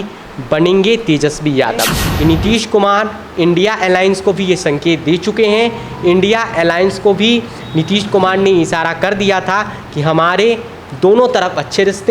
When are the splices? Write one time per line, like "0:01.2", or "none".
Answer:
0:02.0